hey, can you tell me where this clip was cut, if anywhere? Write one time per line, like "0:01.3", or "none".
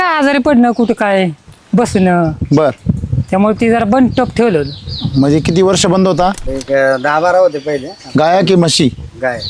0:06.5